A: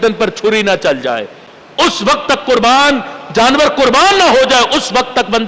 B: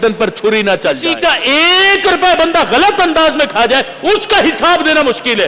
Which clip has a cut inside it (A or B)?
B